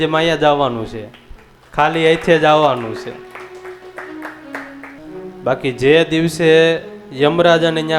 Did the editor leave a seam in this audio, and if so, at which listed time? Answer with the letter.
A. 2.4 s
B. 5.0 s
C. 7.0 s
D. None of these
B